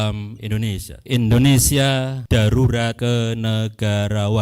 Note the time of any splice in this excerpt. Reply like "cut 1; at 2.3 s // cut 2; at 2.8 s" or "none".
cut 1; at 0.9 s // cut 2; at 2.2 s // cut 3; at 3.0 s